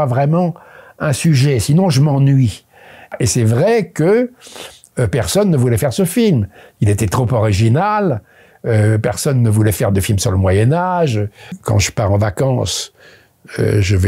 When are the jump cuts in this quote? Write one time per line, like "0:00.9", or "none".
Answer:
0:03.1
0:11.5